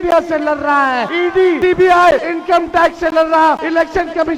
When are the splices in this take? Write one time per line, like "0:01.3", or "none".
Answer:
0:01.4
0:02.3
0:03.6